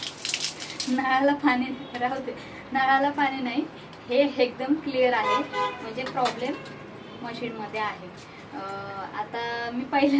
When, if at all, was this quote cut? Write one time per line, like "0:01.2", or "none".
none